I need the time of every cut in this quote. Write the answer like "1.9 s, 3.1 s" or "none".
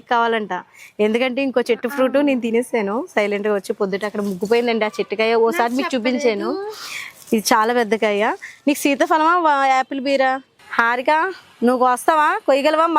10.6 s